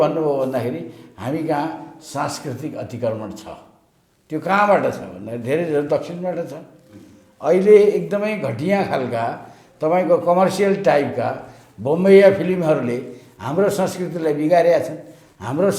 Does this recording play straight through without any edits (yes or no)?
yes